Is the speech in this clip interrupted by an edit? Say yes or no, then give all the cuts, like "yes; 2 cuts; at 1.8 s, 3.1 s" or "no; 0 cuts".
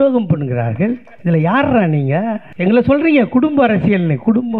yes; 2 cuts; at 1.1 s, 2.5 s